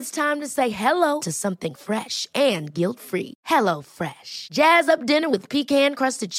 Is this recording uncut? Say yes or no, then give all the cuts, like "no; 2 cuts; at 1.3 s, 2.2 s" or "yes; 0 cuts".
yes; 0 cuts